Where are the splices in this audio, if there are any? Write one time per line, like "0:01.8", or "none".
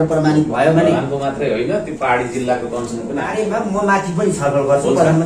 0:03.4

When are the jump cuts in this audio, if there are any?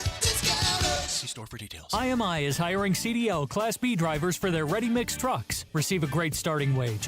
0:01.8

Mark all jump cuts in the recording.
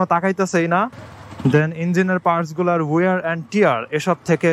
0:01.0

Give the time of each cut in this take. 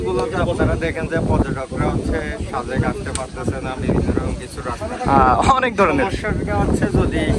none

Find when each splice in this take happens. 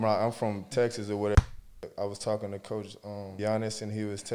0:01.6
0:03.3

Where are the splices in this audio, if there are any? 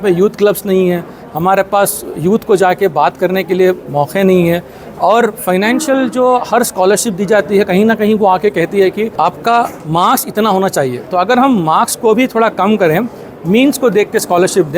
0:09.1

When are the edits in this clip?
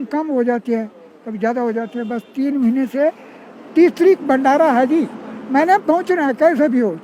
none

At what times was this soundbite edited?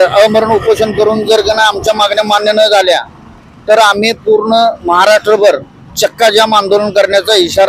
none

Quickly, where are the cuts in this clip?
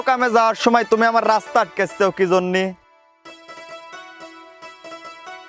0:02.8

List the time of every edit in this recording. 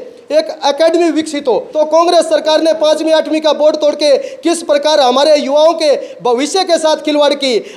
0:01.7

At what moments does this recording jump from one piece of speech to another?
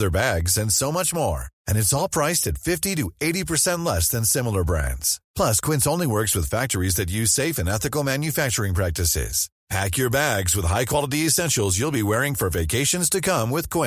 none

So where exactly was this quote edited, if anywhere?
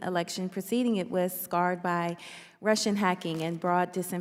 none

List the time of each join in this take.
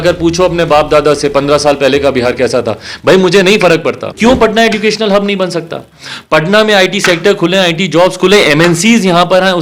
0:04.1

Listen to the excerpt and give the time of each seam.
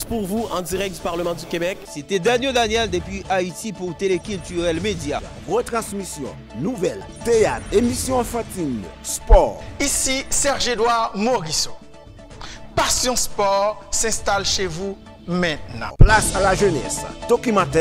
0:07.1

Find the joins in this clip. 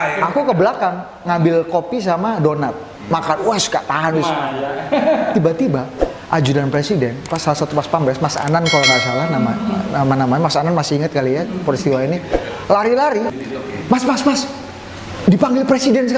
0:13.4

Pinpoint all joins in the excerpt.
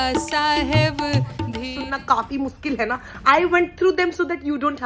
0:01.6

